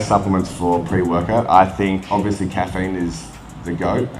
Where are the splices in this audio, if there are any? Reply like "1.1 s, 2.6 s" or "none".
2.0 s